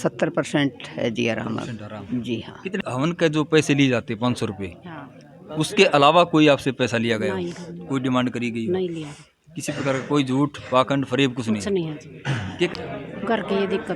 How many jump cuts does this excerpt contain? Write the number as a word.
two